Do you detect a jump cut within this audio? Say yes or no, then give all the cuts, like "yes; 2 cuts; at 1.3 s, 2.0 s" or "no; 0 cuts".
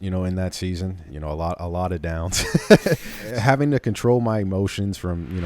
yes; 2 cuts; at 1.1 s, 3.2 s